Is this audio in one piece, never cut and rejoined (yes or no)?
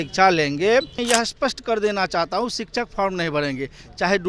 no